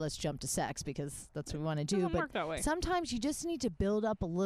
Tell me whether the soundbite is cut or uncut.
uncut